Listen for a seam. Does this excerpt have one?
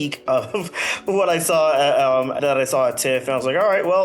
yes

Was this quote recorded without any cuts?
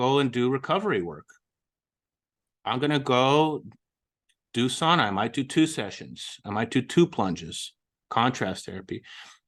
yes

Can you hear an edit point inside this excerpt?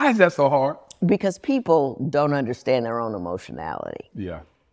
yes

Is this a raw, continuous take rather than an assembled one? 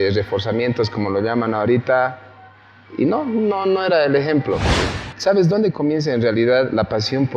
no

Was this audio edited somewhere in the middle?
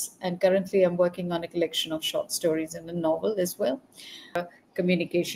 yes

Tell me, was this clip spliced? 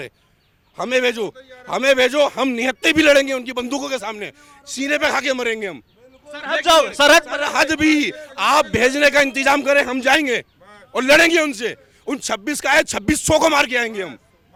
no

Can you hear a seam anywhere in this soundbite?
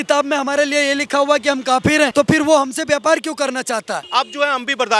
yes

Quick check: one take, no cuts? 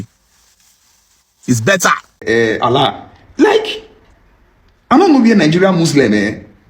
no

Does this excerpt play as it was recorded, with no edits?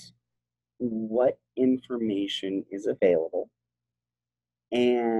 yes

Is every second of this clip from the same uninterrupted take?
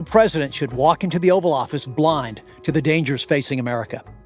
yes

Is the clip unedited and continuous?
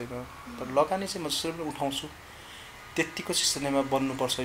yes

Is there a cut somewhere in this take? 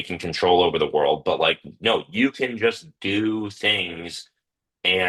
no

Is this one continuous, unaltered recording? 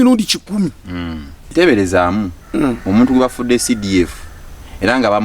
no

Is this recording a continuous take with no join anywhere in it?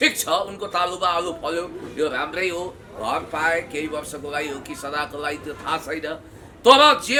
yes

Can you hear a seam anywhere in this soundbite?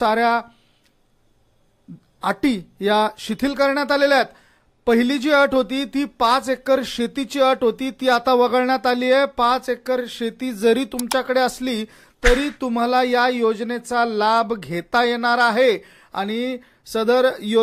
no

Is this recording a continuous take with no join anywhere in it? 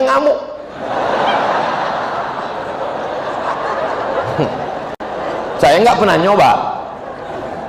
yes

